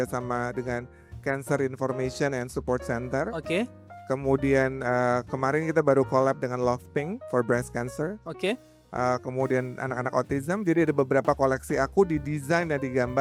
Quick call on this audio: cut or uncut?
uncut